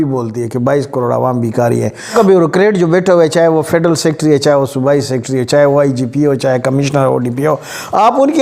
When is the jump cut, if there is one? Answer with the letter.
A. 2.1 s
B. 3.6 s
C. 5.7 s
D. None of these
A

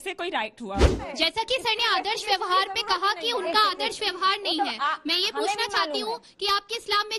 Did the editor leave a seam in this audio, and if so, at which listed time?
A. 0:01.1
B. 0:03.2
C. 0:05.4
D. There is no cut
A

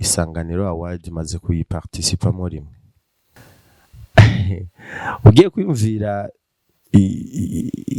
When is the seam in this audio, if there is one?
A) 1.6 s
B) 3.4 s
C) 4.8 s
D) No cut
B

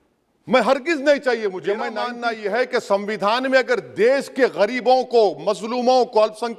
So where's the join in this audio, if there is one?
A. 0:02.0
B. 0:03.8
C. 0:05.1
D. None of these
A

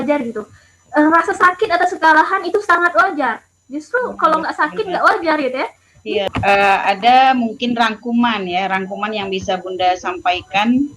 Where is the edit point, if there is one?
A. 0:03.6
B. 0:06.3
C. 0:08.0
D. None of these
B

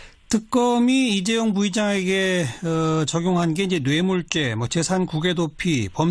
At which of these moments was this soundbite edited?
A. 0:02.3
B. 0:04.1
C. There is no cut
A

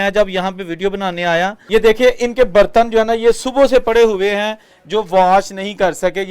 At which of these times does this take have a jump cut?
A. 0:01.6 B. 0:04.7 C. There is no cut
A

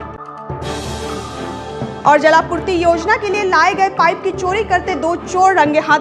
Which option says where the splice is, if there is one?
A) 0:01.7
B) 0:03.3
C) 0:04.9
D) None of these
A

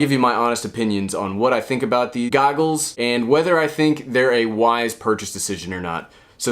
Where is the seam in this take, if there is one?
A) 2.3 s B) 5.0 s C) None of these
A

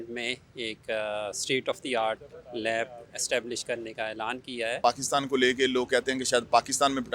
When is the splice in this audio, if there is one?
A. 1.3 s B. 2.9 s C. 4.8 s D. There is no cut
C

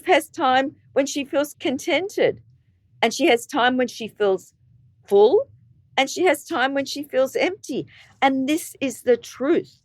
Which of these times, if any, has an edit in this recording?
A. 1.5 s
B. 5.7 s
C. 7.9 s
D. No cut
A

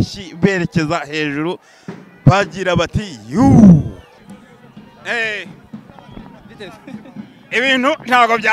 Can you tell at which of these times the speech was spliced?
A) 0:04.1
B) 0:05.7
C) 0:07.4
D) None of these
A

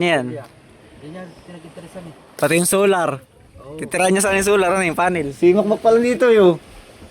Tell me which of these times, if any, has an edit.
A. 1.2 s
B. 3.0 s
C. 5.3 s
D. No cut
C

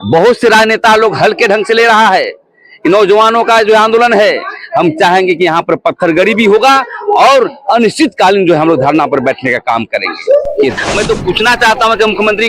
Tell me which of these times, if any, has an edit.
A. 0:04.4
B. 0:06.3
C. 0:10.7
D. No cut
C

